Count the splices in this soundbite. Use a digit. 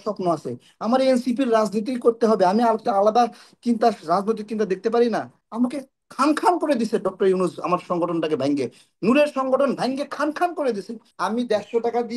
2